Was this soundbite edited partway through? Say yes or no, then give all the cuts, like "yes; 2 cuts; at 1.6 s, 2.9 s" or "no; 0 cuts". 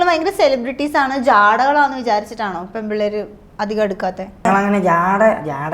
yes; 1 cut; at 4.4 s